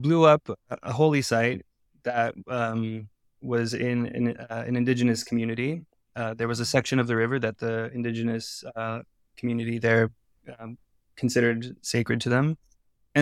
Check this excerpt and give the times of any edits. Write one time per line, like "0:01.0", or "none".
none